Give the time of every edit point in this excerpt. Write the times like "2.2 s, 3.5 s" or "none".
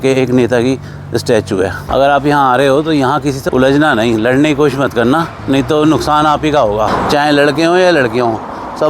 1.8 s, 3.4 s, 6.9 s